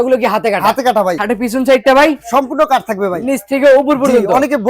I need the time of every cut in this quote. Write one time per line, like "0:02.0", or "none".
0:01.2